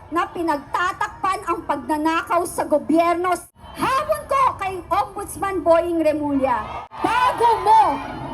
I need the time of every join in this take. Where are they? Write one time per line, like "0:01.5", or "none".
0:03.4
0:06.9